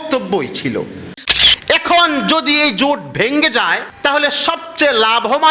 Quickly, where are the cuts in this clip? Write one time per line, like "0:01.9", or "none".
0:01.2
0:03.9